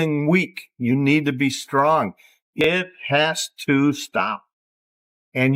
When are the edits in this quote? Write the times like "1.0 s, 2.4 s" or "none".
2.4 s